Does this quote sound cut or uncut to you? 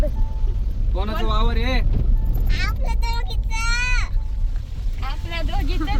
uncut